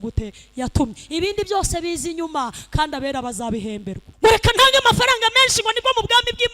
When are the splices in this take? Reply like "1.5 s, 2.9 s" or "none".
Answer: 4.0 s